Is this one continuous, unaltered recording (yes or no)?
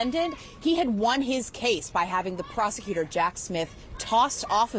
yes